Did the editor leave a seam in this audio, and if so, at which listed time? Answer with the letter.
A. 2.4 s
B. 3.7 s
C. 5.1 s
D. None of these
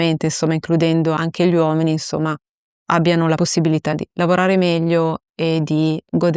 B